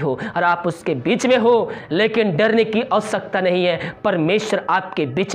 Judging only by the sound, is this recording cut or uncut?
uncut